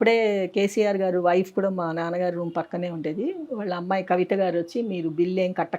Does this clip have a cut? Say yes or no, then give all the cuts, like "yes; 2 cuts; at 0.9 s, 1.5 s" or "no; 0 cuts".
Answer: no; 0 cuts